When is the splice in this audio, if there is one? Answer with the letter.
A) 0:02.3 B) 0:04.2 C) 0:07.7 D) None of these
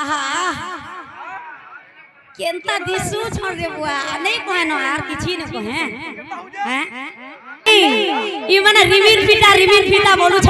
C